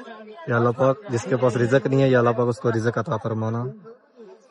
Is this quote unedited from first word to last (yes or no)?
yes